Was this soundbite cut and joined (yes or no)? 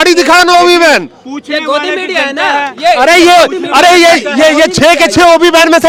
no